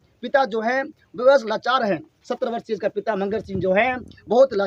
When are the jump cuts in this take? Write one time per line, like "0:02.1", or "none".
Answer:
none